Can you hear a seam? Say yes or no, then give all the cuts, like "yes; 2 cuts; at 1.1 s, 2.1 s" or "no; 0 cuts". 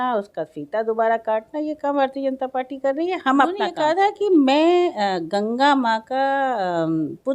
yes; 1 cut; at 3.7 s